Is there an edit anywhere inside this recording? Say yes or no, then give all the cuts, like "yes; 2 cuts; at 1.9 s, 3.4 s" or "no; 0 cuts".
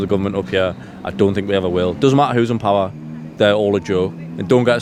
no; 0 cuts